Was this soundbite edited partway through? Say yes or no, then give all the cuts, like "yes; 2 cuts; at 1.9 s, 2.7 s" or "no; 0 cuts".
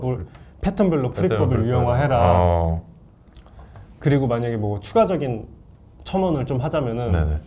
no; 0 cuts